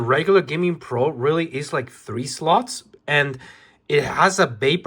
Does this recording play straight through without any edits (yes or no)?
yes